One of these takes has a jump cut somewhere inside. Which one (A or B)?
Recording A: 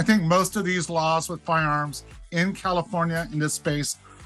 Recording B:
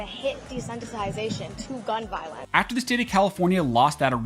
B